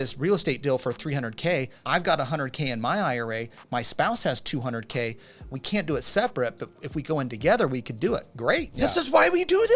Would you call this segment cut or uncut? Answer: cut